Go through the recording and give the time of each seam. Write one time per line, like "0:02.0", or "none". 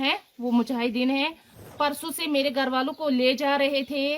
0:01.7